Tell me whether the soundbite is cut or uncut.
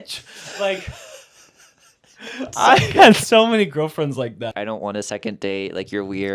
cut